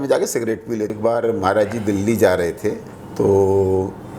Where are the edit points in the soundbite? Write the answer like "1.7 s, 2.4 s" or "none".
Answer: 0.9 s